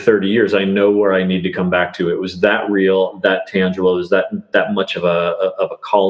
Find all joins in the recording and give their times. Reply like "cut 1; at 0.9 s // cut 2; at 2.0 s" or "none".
none